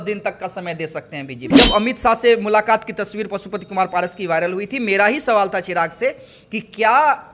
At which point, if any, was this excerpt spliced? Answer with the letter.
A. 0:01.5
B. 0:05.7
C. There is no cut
A